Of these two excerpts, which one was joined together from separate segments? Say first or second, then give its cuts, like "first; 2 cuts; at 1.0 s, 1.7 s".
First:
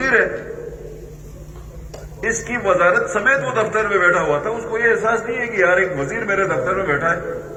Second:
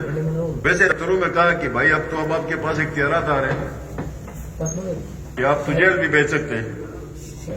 second; 1 cut; at 0.9 s